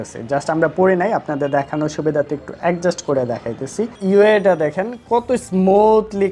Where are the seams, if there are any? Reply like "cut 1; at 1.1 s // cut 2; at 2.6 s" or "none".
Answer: cut 1; at 3.9 s